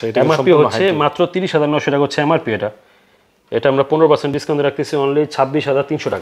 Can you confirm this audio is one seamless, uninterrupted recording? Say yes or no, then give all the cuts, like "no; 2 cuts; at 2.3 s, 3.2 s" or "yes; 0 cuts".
yes; 0 cuts